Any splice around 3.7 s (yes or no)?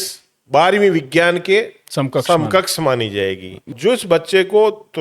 yes